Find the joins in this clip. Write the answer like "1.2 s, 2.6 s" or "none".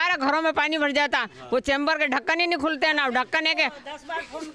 none